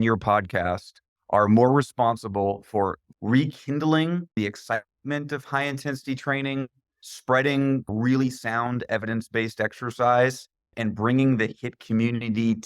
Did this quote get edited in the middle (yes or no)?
yes